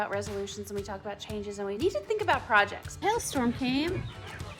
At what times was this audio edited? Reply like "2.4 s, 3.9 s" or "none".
3.0 s